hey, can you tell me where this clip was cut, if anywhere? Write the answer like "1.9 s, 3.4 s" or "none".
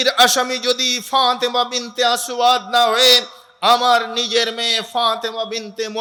none